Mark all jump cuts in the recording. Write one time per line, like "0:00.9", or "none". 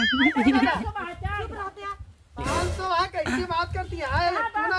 none

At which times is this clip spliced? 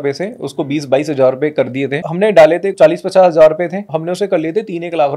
0:02.0
0:02.7
0:03.9

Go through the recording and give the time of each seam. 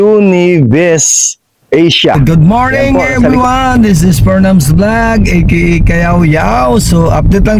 0:02.1

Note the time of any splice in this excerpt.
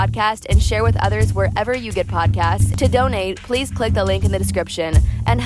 0:02.7

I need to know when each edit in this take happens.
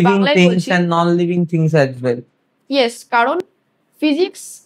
0:03.1

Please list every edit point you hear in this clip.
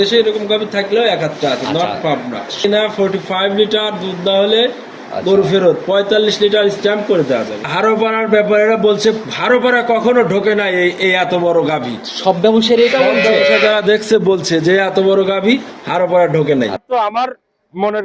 0:02.6
0:07.6
0:16.8

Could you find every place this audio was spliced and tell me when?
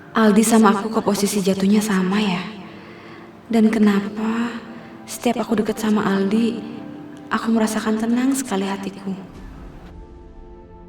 none

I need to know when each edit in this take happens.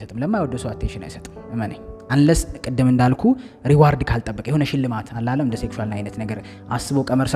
none

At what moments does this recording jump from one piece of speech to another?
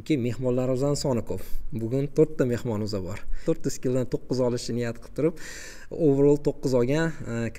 0:03.4

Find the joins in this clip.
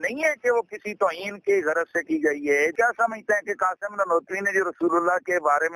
0:02.7

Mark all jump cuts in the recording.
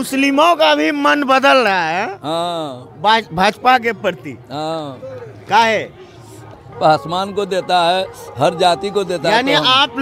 0:06.5

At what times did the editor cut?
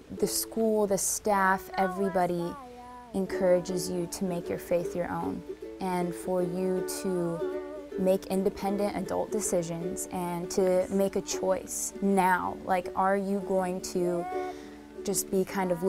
0:13.4

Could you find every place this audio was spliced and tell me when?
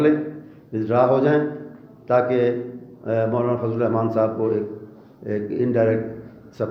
none

